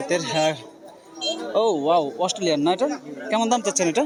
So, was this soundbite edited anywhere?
no; 0 cuts

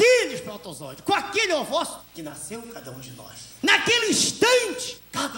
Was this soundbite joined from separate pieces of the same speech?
no; 0 cuts

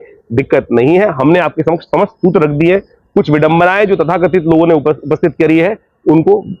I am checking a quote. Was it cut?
no; 0 cuts

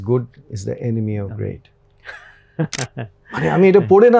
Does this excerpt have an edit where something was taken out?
no; 0 cuts

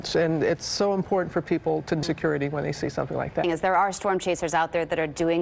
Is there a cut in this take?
yes; 1 cut; at 3.3 s

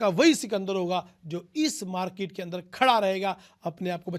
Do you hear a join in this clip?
no; 0 cuts

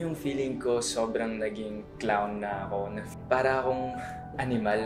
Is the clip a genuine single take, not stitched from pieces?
no; 1 cut; at 3.1 s

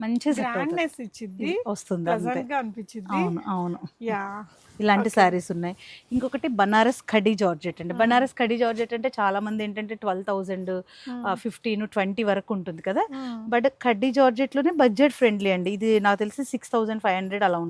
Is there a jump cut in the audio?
no; 0 cuts

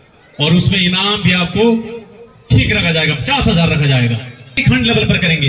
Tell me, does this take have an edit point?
yes; 1 cut; at 4.5 s

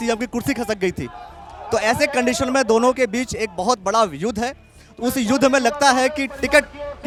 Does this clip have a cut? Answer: no; 0 cuts

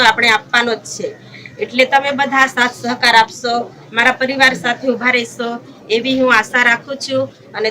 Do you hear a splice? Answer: no; 0 cuts

